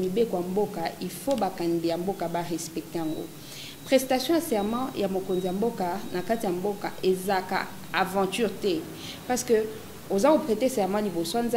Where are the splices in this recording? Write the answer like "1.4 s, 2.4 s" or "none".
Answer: none